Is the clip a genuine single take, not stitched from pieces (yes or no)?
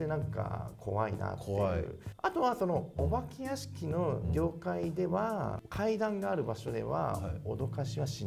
yes